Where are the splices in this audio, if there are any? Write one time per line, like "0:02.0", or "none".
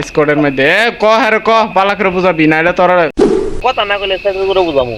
0:03.6